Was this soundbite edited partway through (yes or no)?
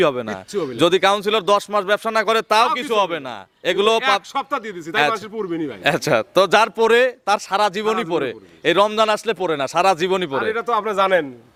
no